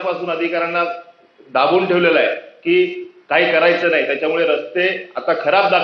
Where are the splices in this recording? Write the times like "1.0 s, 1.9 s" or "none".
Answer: none

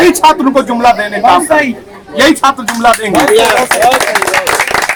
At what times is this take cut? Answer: none

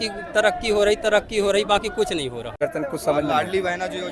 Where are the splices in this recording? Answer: 2.6 s

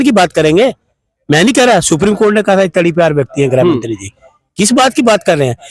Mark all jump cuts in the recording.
none

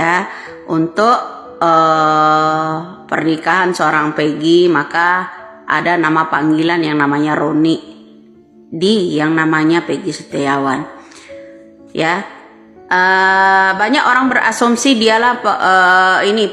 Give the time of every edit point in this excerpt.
none

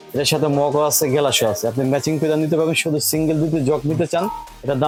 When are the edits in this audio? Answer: none

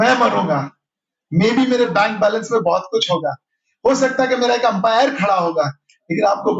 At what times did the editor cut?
none

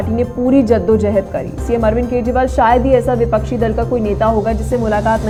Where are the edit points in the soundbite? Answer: none

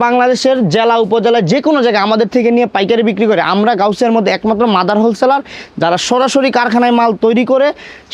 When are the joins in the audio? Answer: none

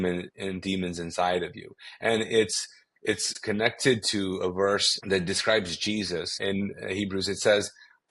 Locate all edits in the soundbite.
3.3 s, 4.9 s, 6.4 s

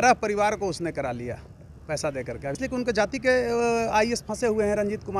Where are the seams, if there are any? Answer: 2.5 s

